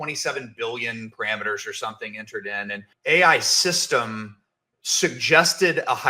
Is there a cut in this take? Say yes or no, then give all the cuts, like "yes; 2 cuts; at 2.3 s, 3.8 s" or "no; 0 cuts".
yes; 1 cut; at 2.9 s